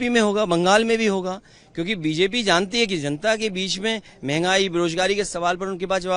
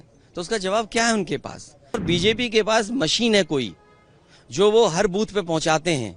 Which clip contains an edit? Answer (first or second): second